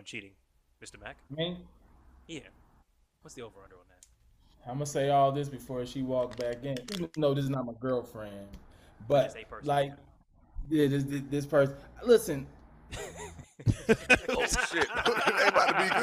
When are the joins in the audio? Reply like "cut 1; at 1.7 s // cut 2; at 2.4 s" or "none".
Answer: none